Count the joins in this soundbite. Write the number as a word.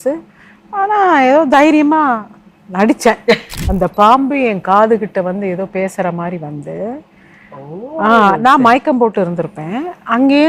one